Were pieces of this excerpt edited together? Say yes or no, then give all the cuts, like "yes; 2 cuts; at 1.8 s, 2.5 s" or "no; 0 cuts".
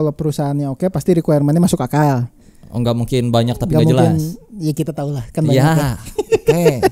no; 0 cuts